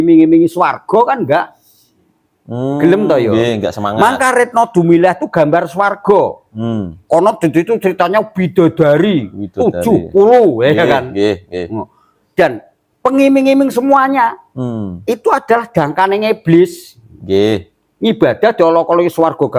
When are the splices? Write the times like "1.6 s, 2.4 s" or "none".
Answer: none

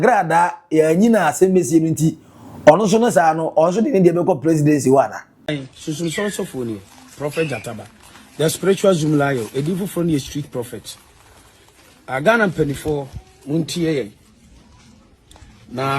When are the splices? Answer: 5.3 s

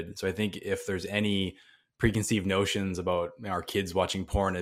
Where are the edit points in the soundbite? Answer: none

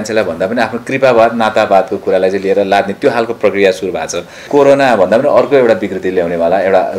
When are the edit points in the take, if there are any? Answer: 4.5 s

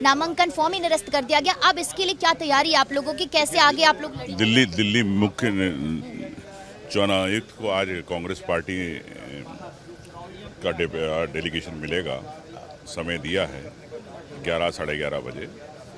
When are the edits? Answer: none

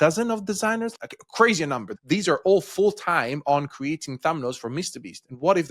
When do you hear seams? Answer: 0.9 s, 1.9 s

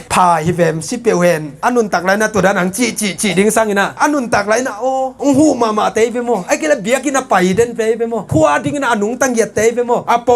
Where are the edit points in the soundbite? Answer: 1.6 s, 8.3 s

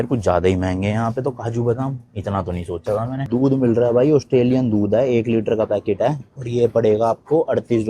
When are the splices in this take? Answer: none

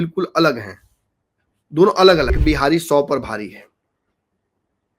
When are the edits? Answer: 2.4 s

